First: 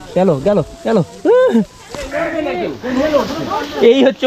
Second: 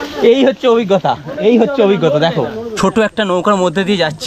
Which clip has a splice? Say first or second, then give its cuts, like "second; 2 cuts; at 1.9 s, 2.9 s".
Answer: second; 1 cut; at 2.7 s